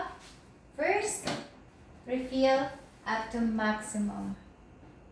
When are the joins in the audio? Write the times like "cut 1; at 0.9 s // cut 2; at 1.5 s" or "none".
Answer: none